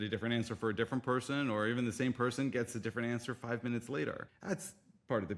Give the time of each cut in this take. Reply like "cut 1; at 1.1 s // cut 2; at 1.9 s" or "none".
cut 1; at 4.3 s

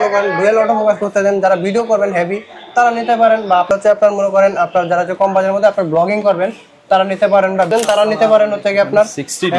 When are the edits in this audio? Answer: cut 1; at 3.7 s // cut 2; at 7.7 s

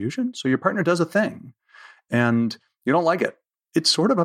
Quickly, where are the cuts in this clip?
none

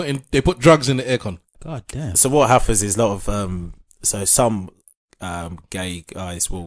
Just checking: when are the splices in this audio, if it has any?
cut 1; at 1.5 s

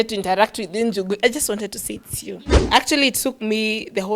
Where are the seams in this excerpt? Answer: cut 1; at 2.7 s

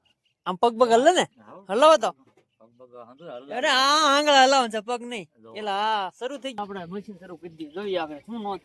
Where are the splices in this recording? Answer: cut 1; at 6.5 s

